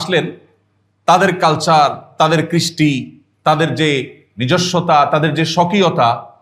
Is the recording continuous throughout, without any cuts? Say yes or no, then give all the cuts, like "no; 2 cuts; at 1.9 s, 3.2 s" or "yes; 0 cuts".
yes; 0 cuts